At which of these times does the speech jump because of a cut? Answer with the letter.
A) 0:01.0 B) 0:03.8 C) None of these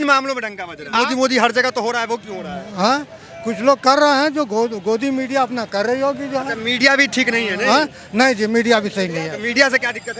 A